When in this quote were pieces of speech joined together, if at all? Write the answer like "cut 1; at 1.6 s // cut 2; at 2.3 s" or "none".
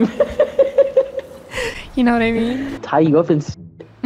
cut 1; at 2.8 s